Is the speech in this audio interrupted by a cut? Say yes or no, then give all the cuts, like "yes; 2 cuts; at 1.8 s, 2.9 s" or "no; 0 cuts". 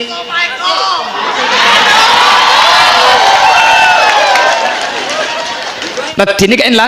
yes; 1 cut; at 6.0 s